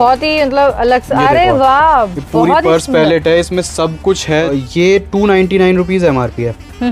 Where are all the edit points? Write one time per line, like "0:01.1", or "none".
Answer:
0:04.5